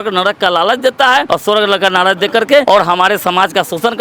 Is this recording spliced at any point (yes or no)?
yes